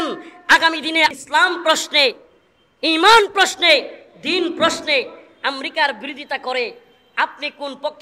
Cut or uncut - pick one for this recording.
cut